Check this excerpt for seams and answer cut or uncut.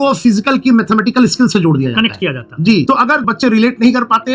uncut